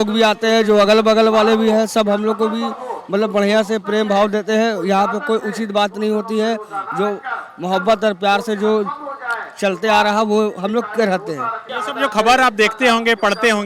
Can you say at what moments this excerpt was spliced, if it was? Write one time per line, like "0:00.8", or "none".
0:11.6